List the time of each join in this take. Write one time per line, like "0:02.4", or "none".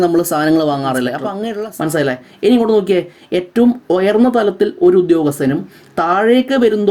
0:01.4